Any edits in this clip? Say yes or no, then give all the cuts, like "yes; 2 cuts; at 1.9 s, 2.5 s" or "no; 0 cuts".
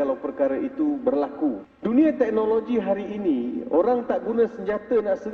yes; 1 cut; at 1.7 s